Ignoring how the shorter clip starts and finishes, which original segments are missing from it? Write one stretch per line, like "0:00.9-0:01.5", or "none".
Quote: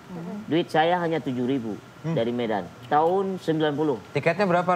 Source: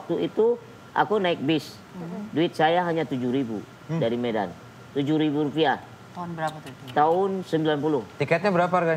0:04.6-0:06.8